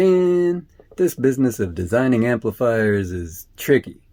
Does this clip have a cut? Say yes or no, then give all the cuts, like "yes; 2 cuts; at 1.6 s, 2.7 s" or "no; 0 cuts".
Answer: no; 0 cuts